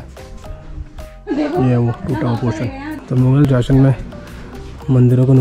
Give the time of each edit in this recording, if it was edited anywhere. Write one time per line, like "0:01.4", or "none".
0:01.1
0:03.0